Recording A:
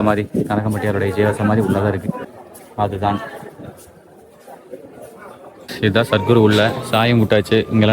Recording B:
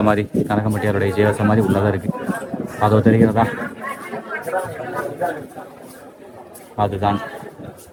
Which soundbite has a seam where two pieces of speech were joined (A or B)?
A